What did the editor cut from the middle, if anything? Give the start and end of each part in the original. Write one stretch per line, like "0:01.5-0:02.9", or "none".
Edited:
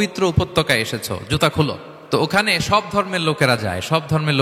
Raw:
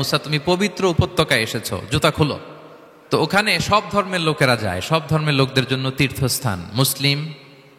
0:02.5-0:02.9